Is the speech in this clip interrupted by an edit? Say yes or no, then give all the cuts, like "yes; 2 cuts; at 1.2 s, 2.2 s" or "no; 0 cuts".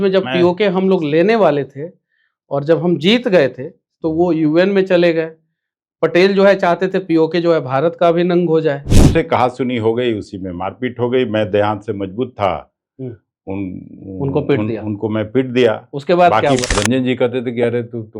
yes; 2 cuts; at 8.9 s, 16.7 s